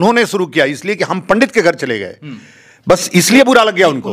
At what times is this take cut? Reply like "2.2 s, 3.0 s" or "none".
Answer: none